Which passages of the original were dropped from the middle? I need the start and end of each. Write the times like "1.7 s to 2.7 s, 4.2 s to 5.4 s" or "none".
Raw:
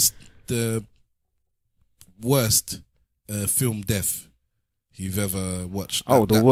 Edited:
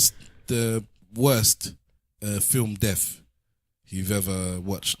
1.0 s to 2.1 s